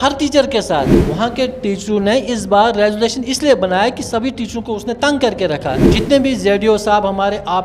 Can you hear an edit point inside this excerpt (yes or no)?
yes